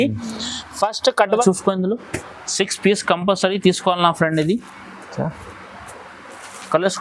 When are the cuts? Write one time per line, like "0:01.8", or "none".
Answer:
0:01.4